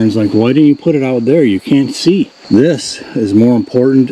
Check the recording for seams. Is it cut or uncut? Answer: cut